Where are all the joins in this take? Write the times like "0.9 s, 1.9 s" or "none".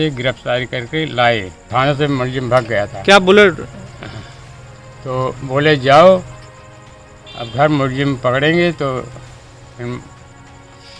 1.7 s